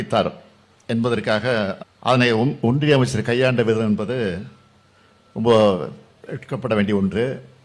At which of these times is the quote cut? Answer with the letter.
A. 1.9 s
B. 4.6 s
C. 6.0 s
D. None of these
A